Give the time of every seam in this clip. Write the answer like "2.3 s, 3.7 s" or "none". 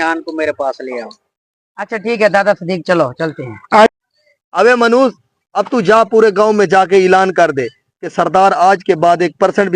3.9 s